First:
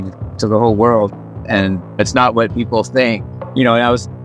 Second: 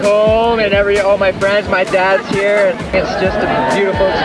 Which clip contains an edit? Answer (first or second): second